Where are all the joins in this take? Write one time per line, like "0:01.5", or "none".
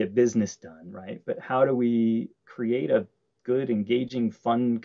none